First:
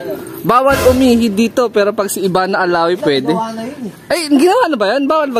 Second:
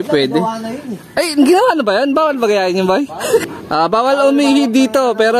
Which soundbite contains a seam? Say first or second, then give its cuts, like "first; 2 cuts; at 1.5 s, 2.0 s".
second; 1 cut; at 3.4 s